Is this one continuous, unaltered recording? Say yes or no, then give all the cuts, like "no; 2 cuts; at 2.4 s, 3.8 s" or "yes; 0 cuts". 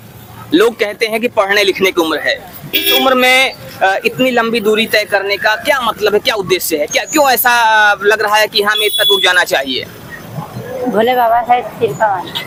yes; 0 cuts